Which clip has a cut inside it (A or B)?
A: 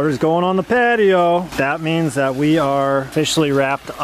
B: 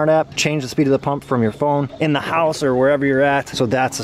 A